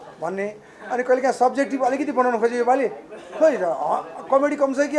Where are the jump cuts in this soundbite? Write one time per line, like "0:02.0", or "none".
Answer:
none

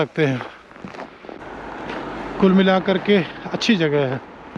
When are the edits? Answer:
0:01.4

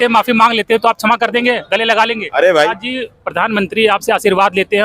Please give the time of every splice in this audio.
0:02.7

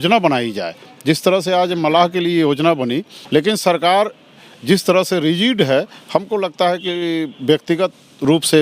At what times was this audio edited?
0:03.1

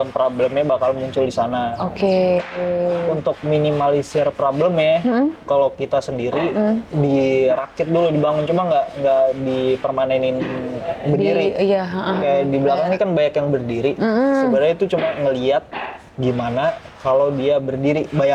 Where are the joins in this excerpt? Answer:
none

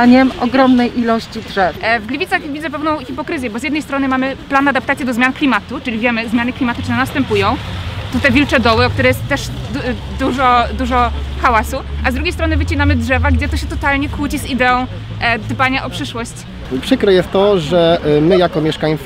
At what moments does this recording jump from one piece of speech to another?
0:01.8
0:16.6

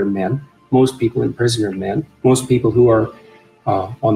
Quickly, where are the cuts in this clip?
0:02.1

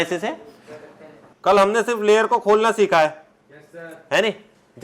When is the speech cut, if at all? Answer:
0:01.3

